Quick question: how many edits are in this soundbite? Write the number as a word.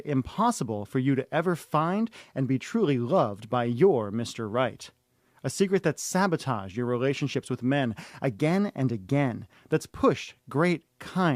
one